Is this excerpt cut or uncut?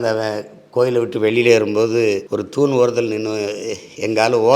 cut